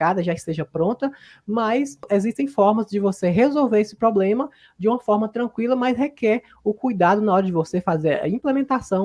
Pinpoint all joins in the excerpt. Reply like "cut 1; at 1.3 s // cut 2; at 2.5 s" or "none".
cut 1; at 2.0 s